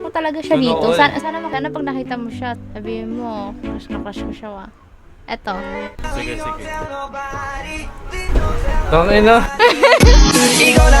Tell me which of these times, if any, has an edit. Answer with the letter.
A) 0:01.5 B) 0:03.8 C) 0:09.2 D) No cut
A